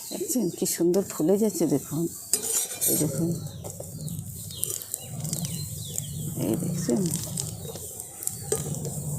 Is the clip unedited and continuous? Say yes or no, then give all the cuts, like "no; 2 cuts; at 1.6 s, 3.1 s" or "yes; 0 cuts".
yes; 0 cuts